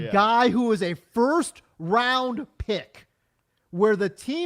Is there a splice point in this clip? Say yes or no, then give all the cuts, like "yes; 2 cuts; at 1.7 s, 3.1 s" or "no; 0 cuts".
no; 0 cuts